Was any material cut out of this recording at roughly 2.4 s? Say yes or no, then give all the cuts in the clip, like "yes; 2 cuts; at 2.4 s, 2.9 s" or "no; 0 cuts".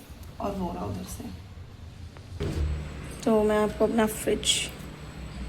yes; 1 cut; at 2.4 s